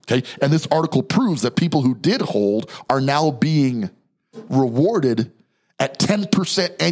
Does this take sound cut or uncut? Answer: uncut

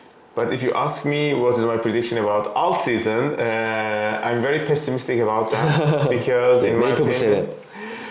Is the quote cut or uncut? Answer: uncut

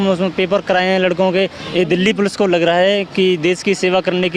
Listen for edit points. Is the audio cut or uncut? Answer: cut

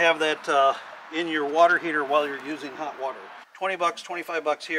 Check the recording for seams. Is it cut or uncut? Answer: cut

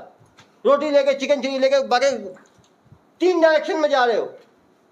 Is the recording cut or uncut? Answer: uncut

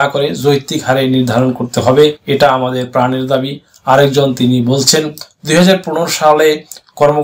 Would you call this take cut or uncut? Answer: cut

